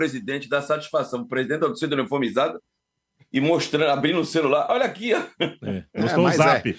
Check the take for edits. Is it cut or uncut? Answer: uncut